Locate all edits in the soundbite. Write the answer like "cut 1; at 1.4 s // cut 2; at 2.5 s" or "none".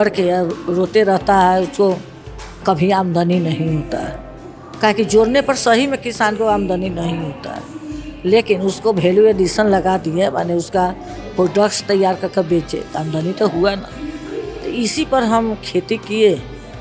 none